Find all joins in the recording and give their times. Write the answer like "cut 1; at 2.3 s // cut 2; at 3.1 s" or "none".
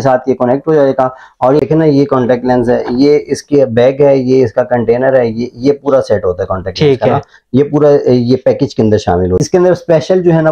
cut 1; at 1.7 s // cut 2; at 9.4 s